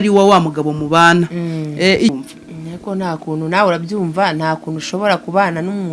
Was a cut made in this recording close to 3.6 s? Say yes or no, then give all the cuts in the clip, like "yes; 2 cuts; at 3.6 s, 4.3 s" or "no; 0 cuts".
no; 1 cut; at 2.1 s